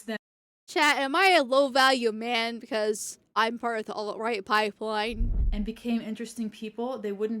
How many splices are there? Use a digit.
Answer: 1